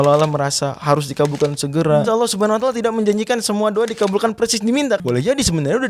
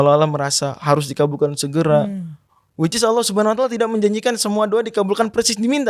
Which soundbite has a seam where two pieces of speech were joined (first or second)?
first